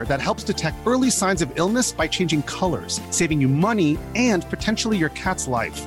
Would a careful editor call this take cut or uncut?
uncut